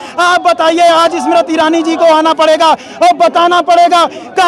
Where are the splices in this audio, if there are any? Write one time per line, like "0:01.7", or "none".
none